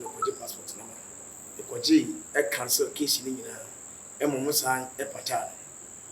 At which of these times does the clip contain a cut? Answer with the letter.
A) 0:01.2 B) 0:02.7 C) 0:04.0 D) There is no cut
A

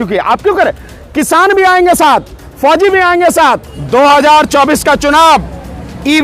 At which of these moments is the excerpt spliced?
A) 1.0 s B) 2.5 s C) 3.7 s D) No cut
C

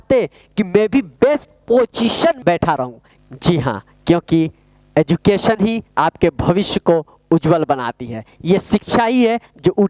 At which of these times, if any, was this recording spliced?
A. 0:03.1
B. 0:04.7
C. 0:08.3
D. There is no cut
A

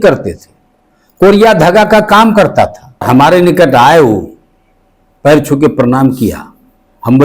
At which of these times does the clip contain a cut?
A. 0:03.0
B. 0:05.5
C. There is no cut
A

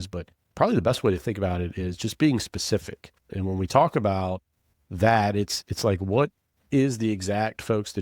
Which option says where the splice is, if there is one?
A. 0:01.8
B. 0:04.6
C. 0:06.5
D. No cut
C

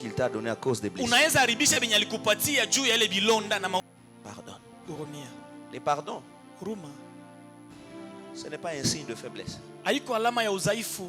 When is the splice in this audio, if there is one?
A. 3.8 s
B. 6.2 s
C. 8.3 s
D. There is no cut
A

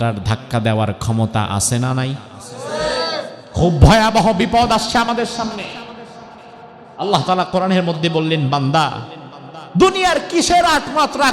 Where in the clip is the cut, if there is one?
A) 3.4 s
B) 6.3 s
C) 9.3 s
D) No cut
A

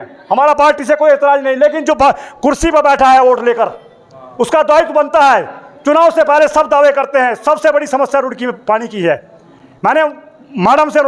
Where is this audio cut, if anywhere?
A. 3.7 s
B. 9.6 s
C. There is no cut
C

